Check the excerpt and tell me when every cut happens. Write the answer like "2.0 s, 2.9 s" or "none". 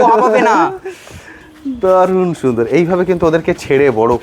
none